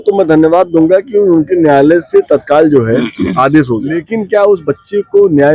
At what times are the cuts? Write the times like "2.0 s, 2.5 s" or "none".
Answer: 4.1 s